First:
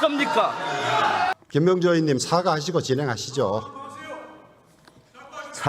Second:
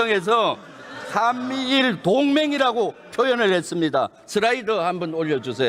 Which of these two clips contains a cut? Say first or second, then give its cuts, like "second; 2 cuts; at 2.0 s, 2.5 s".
first; 1 cut; at 1.3 s